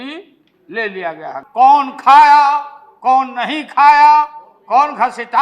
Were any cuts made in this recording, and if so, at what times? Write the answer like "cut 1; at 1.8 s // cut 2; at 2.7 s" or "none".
cut 1; at 1.3 s